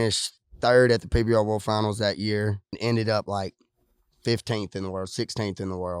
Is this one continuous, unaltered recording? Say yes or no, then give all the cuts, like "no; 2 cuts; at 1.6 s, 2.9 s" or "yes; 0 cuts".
no; 1 cut; at 2.8 s